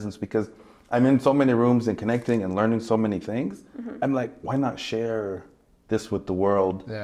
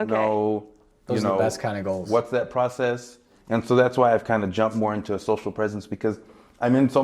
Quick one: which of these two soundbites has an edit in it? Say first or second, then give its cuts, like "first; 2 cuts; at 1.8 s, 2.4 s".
second; 1 cut; at 3.3 s